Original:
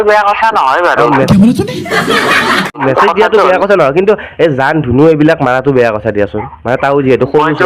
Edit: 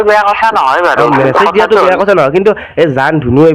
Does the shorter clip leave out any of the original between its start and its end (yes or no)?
yes